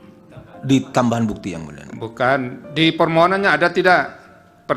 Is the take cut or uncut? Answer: uncut